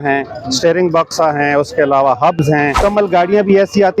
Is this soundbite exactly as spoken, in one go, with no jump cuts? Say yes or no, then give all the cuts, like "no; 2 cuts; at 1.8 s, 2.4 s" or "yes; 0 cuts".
no; 1 cut; at 2.8 s